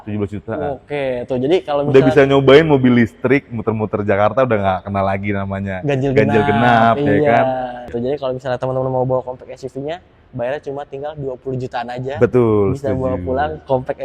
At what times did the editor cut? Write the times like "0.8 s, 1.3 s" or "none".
7.9 s

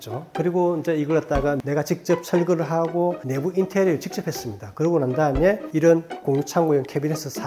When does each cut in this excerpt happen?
1.6 s

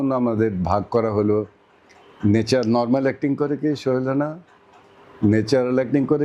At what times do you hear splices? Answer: none

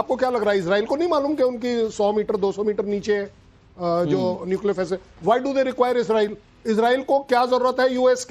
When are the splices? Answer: 5.0 s

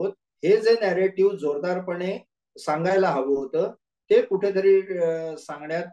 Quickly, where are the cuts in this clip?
none

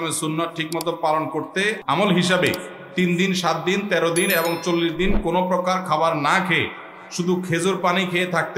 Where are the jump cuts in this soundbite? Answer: 1.8 s

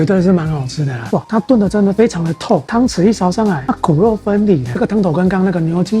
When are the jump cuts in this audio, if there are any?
1.0 s, 4.7 s

